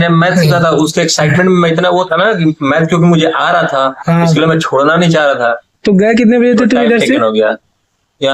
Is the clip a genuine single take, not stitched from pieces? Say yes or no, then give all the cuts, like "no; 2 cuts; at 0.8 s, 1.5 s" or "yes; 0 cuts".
yes; 0 cuts